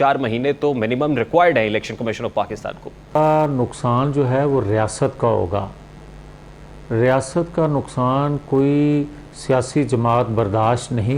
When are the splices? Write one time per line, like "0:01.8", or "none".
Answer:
0:03.1